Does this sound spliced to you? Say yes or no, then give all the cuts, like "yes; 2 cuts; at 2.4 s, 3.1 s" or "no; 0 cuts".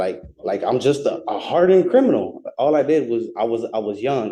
no; 0 cuts